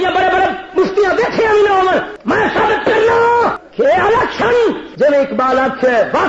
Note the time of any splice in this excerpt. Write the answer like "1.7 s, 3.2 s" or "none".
2.1 s, 3.6 s, 4.9 s